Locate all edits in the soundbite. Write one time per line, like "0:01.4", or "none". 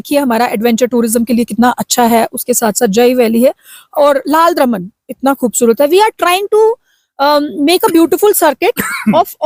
none

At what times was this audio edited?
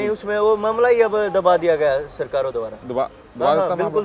0:02.8

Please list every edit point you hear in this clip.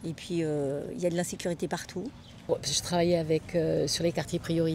0:02.4

